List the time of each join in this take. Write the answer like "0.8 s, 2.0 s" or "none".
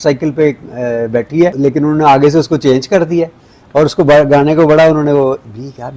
1.6 s